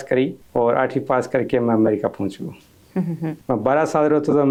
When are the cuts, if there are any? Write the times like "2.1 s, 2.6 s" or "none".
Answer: none